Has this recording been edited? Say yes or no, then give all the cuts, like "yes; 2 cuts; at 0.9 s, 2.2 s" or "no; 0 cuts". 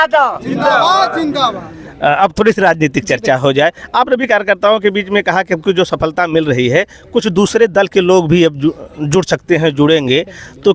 no; 0 cuts